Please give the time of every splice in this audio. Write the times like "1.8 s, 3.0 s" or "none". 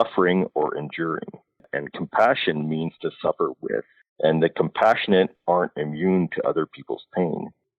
1.6 s, 4.0 s